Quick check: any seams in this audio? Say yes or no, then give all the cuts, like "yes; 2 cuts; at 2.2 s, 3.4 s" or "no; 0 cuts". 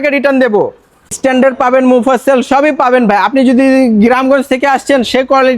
yes; 1 cut; at 1.2 s